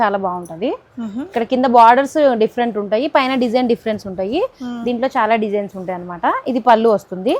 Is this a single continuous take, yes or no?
yes